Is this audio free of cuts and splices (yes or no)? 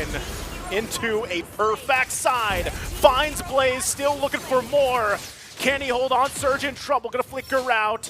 no